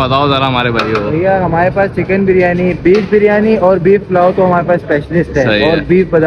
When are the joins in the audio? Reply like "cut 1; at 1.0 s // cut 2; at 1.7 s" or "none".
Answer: none